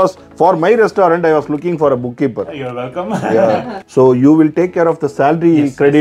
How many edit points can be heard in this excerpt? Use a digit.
1